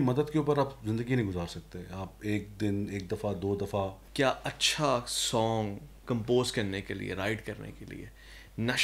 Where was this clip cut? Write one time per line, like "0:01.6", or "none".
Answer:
0:04.0
0:06.0